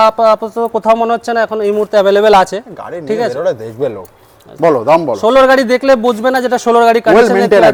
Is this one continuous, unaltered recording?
yes; 0 cuts

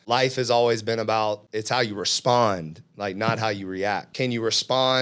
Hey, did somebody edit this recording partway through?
yes; 2 cuts; at 1.5 s, 4.1 s

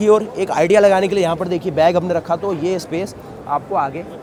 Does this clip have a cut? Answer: no; 0 cuts

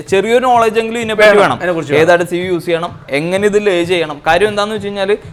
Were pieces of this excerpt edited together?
no; 0 cuts

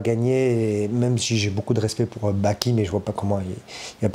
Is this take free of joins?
yes; 0 cuts

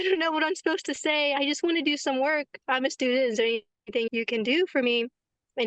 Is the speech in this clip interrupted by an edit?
yes; 2 cuts; at 1.4 s, 4.1 s

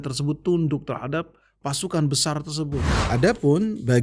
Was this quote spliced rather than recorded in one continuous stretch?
yes; 1 cut; at 2.9 s

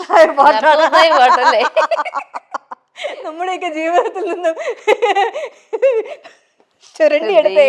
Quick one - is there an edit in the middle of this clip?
no; 0 cuts

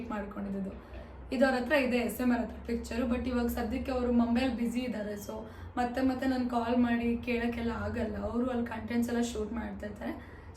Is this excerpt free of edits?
yes; 0 cuts

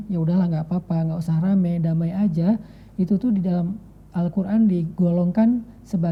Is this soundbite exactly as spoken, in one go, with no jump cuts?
yes; 0 cuts

